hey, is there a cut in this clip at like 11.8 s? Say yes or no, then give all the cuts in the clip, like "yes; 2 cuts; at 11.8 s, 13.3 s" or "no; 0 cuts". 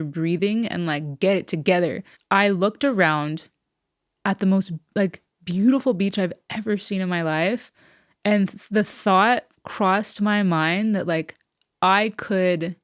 no; 1 cut; at 2.1 s